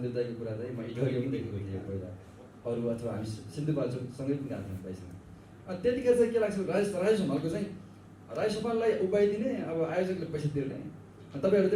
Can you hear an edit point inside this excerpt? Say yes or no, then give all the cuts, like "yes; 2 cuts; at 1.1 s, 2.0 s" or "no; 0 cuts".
no; 0 cuts